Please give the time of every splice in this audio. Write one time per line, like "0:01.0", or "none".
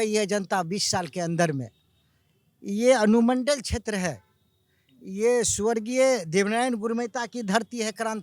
none